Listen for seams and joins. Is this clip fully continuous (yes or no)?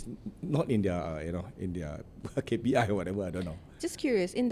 yes